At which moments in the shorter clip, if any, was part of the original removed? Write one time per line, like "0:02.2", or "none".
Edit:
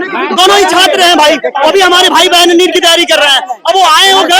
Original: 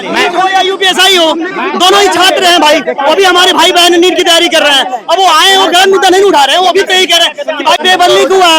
none